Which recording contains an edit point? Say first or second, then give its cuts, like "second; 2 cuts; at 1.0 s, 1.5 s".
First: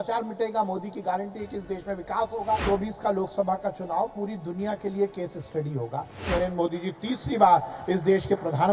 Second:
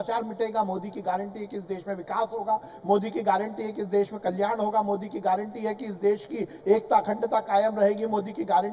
first; 2 cuts; at 2.6 s, 6.3 s